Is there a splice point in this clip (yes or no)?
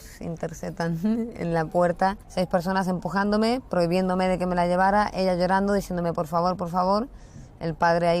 yes